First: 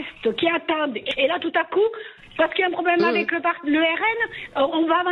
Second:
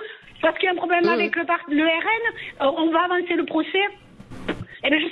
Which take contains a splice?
first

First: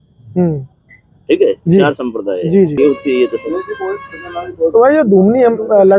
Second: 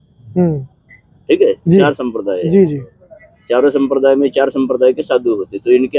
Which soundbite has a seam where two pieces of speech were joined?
first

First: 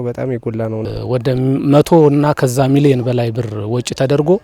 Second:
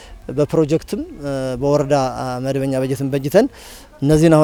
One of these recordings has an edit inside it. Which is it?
first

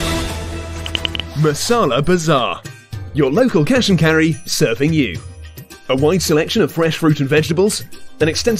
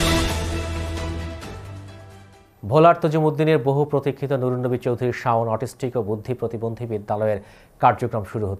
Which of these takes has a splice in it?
first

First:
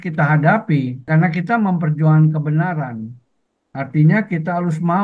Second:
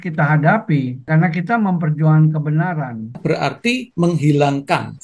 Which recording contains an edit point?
second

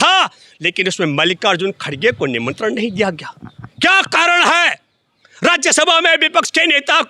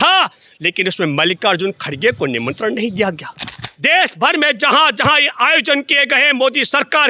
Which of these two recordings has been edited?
second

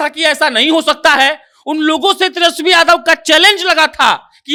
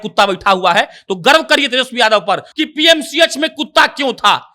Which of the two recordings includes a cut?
second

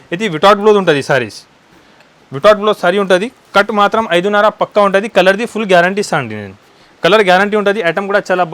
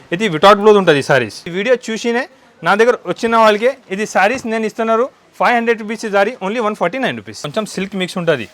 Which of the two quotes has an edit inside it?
second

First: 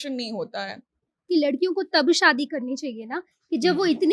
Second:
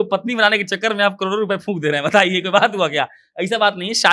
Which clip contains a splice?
first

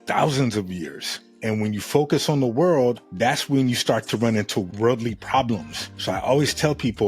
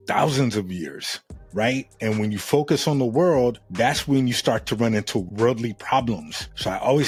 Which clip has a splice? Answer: first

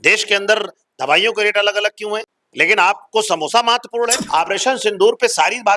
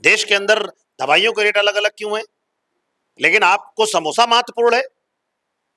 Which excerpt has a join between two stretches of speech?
first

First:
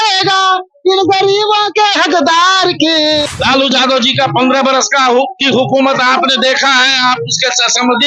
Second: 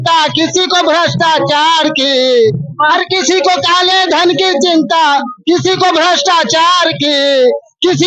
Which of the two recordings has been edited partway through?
first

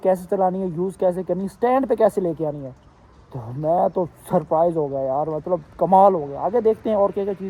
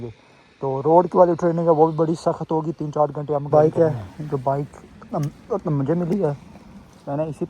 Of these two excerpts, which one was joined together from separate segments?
second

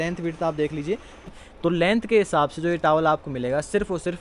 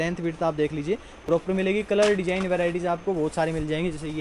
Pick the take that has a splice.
first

